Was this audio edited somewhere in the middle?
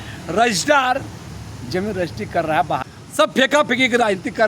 yes; 1 cut; at 2.9 s

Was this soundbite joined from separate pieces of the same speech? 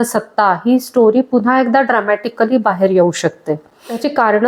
no; 0 cuts

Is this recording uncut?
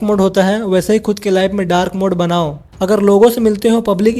no; 1 cut; at 2.6 s

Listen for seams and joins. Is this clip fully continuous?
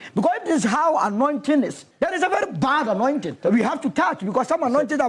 no; 2 cuts; at 1.8 s, 3.4 s

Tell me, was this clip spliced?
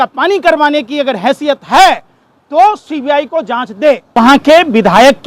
yes; 1 cut; at 4.0 s

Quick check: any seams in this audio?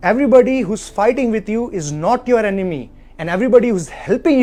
no; 0 cuts

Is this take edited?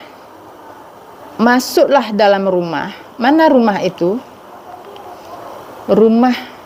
no; 0 cuts

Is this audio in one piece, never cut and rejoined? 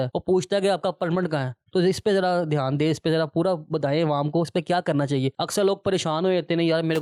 yes; 0 cuts

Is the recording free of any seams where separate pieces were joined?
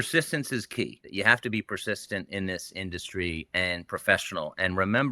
no; 1 cut; at 1.0 s

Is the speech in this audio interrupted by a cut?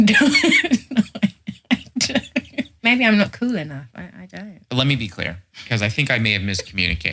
yes; 1 cut; at 2.9 s

